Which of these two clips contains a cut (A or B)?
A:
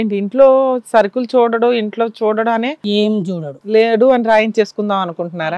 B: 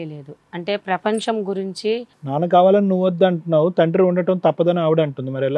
B